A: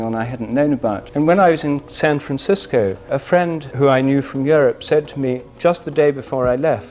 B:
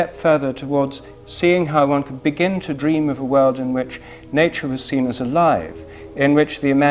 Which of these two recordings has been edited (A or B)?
A